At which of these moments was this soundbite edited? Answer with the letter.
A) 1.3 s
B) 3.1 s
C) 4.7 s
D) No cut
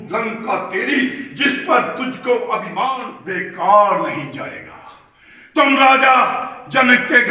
B